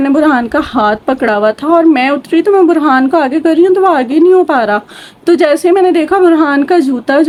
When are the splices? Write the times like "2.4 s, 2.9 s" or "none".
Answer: none